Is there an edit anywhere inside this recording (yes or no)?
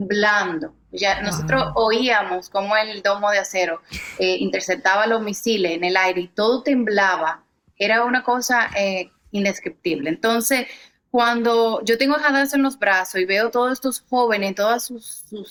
no